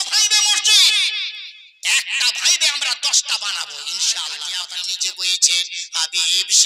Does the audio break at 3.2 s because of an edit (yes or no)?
no